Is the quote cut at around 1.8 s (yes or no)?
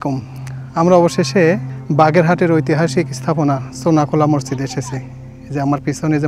yes